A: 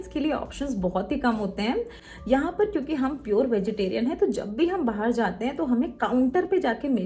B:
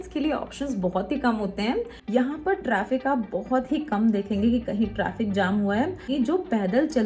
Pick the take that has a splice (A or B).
B